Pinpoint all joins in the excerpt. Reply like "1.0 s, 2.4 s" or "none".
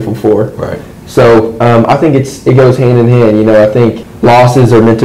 4.1 s

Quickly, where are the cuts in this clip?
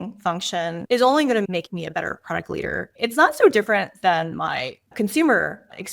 1.5 s, 2.9 s

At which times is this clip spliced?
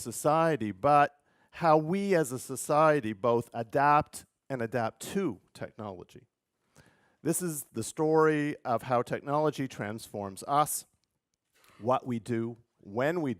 11.8 s

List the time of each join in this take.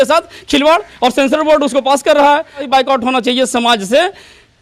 2.7 s

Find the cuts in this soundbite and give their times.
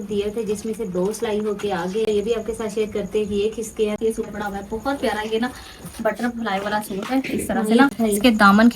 2.1 s, 4.0 s, 7.9 s

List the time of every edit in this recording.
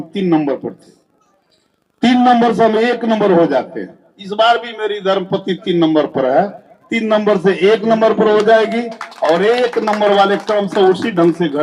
none

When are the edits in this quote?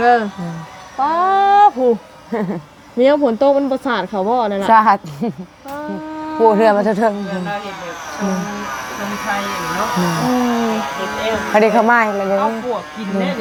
none

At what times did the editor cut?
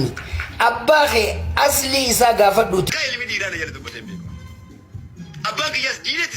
2.9 s

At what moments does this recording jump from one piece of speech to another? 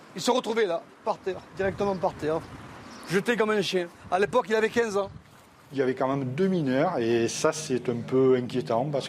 5.7 s

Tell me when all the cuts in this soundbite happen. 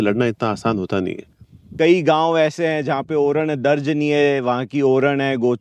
1.7 s

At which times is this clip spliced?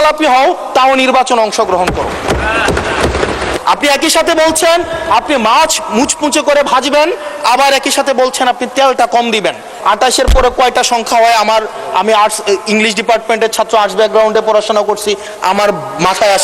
3.6 s, 9.7 s

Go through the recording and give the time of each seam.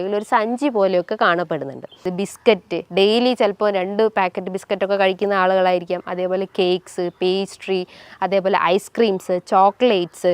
2.1 s

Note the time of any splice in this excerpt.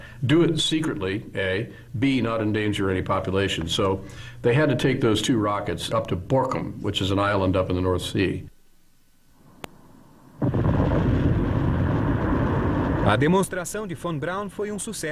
13.2 s

